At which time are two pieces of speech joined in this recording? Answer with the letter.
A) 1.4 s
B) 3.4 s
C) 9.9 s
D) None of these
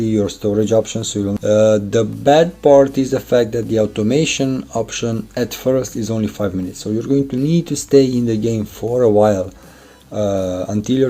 A